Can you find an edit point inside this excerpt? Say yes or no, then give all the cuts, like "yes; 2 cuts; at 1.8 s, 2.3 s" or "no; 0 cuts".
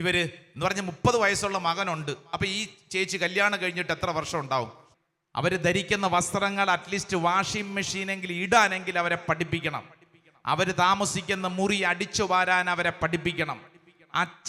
yes; 1 cut; at 4.8 s